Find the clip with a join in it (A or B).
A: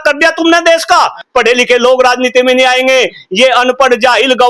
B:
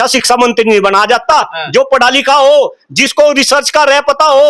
A